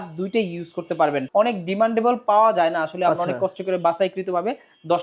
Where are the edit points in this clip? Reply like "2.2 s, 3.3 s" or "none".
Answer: 1.2 s